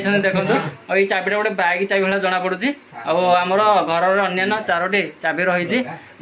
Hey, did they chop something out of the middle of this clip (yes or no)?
no